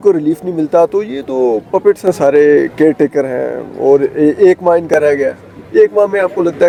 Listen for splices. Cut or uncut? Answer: uncut